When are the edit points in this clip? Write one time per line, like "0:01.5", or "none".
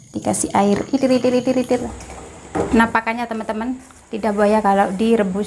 0:01.8

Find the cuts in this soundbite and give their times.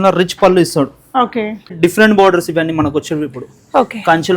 0:01.6

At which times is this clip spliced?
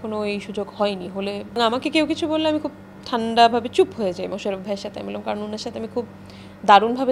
0:01.6
0:04.3

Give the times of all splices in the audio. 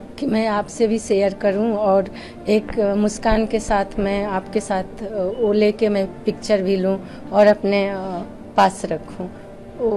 none

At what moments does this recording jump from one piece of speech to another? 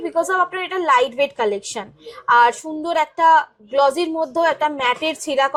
none

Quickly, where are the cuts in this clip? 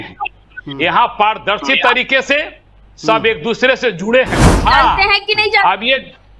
0:04.4

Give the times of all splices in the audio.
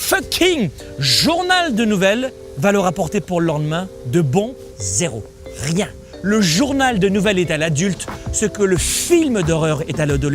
0:02.4
0:04.6
0:06.1

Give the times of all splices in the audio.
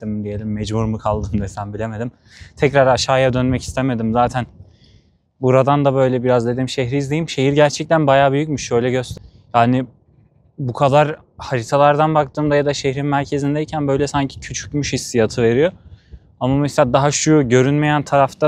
none

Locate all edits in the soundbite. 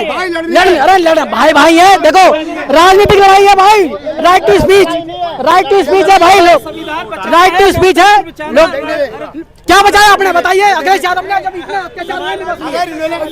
none

